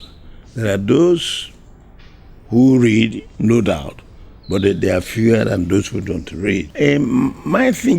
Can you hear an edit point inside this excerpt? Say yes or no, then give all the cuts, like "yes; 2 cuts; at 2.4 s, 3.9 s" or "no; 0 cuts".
yes; 1 cut; at 6.7 s